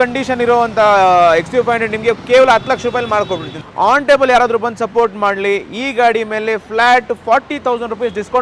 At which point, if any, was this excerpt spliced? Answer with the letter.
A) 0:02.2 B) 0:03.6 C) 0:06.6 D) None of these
B